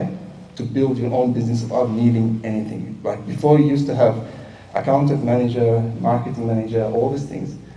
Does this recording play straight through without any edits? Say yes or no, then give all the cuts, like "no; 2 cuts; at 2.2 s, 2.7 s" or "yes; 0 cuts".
yes; 0 cuts